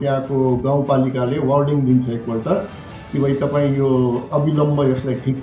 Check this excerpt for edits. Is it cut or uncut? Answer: uncut